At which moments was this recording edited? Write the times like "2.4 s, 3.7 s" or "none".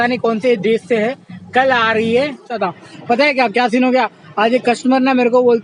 2.6 s